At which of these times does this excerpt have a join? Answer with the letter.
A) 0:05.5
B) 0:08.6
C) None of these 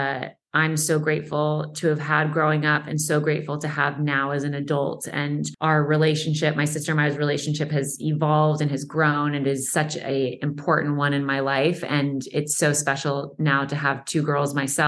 A